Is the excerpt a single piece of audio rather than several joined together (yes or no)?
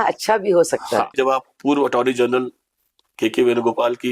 no